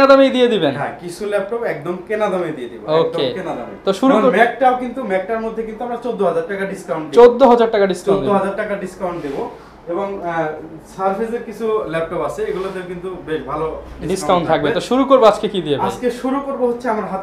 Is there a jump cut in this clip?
no; 0 cuts

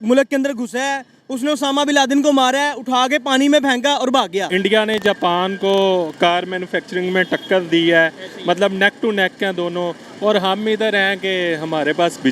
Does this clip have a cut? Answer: yes; 1 cut; at 4.5 s

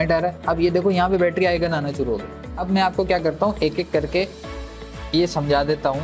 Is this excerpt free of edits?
no; 1 cut; at 2.5 s

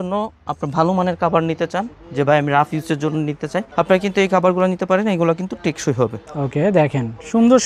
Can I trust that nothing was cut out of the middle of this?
yes; 0 cuts

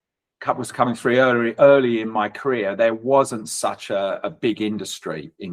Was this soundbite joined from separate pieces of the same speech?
no; 0 cuts

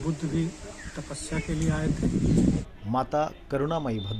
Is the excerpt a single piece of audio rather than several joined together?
no; 1 cut; at 2.7 s

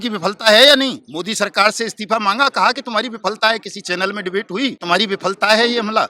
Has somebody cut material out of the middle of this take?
yes; 2 cuts; at 1.0 s, 4.8 s

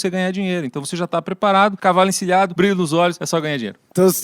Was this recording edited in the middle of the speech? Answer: yes; 3 cuts; at 1.8 s, 2.5 s, 3.3 s

